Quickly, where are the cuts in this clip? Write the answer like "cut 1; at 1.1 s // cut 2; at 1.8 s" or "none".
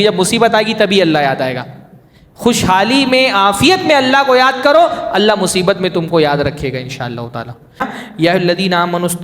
cut 1; at 7.9 s